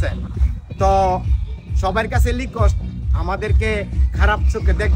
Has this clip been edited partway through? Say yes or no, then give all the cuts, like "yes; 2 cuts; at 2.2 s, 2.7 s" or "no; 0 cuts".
no; 0 cuts